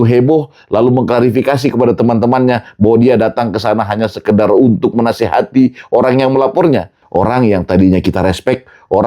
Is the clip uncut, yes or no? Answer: no